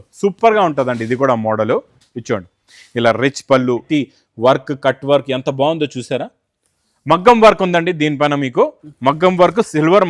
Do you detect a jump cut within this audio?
yes; 1 cut; at 3.8 s

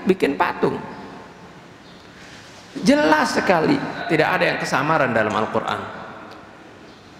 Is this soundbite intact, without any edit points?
no; 1 cut; at 4.0 s

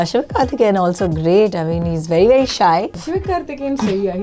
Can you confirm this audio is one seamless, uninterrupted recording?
yes; 0 cuts

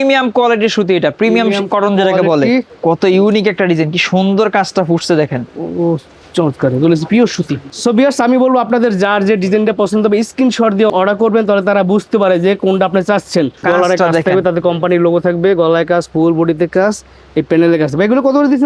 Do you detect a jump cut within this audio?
yes; 4 cuts; at 2.7 s, 7.6 s, 10.9 s, 13.6 s

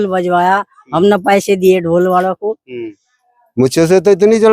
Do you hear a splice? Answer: yes; 1 cut; at 2.9 s

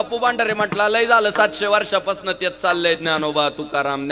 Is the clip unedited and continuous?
yes; 0 cuts

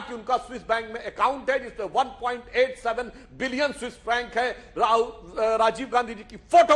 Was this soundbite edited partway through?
no; 0 cuts

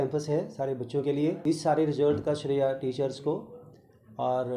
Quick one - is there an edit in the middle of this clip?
yes; 1 cut; at 1.4 s

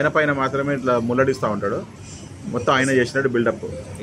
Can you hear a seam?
no; 0 cuts

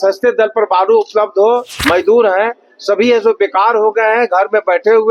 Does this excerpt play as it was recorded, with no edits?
no; 1 cut; at 1.7 s

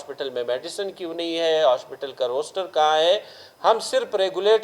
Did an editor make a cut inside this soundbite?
no; 0 cuts

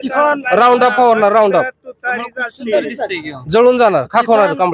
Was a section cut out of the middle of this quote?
no; 0 cuts

